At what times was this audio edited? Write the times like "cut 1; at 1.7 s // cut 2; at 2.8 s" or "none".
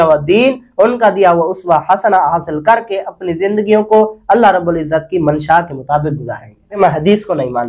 cut 1; at 6.7 s